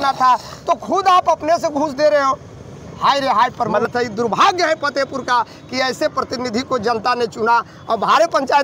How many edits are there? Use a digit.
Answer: 1